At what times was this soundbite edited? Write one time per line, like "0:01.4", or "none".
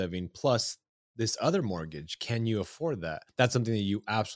0:03.2